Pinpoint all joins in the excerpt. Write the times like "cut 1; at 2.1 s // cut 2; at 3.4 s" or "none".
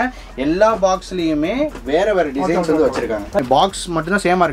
cut 1; at 3.4 s